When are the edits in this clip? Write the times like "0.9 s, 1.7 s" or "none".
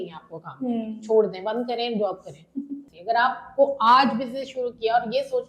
2.8 s

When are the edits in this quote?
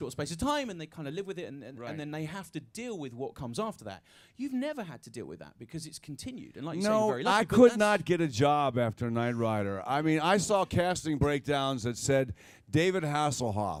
none

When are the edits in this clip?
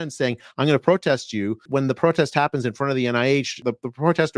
1.6 s, 3.6 s

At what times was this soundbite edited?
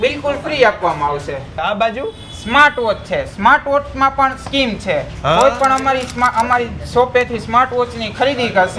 none

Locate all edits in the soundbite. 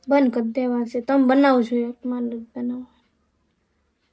none

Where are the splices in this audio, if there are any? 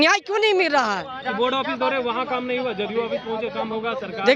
1.2 s

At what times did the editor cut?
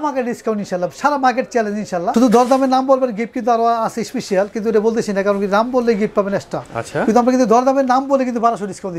2.1 s, 6.6 s

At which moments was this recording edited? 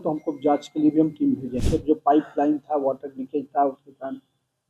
1.6 s

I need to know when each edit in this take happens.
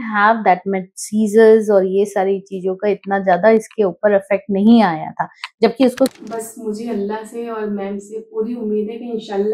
6.1 s

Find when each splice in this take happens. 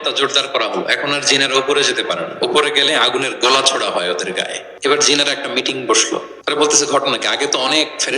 4.6 s, 6.3 s

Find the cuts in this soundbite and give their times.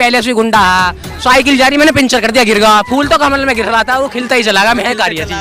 none

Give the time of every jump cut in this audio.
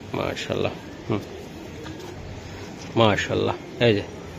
none

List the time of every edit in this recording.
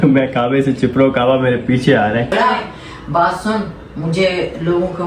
2.3 s

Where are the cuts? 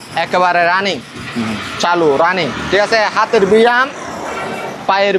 none

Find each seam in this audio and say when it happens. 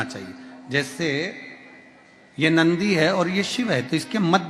none

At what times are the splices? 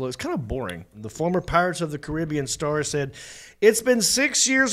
1.0 s

